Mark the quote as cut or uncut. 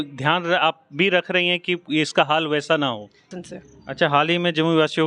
cut